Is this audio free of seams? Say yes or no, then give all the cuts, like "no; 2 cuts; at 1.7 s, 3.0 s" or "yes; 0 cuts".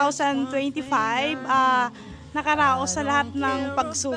yes; 0 cuts